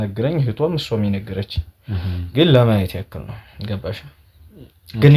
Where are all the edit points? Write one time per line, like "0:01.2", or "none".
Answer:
none